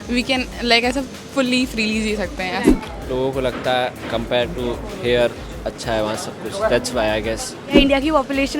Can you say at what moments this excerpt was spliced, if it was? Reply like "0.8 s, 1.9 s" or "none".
2.7 s, 7.8 s